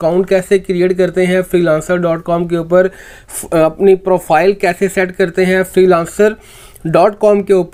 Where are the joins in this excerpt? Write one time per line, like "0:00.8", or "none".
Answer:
none